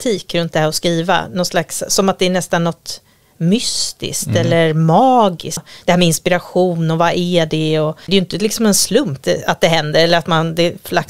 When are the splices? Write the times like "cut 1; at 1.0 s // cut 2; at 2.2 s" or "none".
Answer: cut 1; at 5.7 s // cut 2; at 7.9 s // cut 3; at 9.2 s